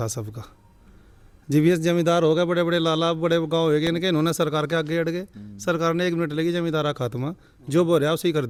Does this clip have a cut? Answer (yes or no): no